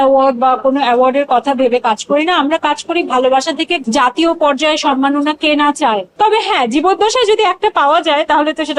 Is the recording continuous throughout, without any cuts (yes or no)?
no